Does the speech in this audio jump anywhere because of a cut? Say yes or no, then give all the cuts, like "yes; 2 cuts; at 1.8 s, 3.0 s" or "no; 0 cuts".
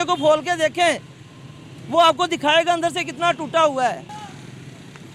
yes; 1 cut; at 4.0 s